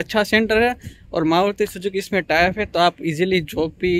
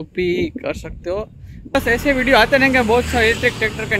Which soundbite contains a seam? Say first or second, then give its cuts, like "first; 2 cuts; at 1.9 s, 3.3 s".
second; 1 cut; at 1.7 s